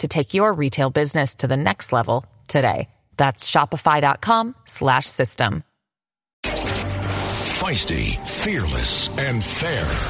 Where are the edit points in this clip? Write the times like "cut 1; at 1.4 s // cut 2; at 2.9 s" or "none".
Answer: cut 1; at 6.4 s